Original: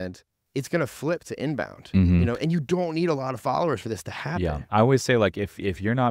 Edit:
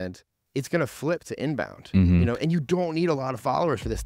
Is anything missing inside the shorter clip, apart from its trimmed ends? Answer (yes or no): no